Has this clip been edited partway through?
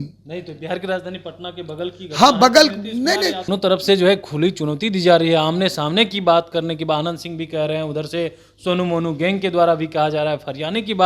yes; 1 cut; at 3.5 s

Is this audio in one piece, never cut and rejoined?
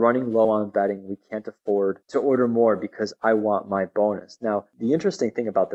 no; 2 cuts; at 2.0 s, 4.7 s

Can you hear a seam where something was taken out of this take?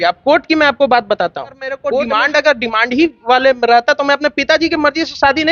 yes; 1 cut; at 1.9 s

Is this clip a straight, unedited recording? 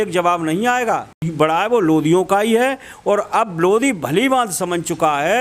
no; 1 cut; at 1.3 s

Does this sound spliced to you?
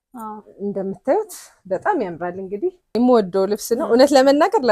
yes; 1 cut; at 2.9 s

